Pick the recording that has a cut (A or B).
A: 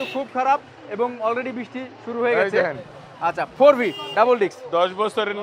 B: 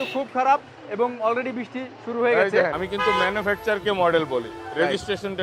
B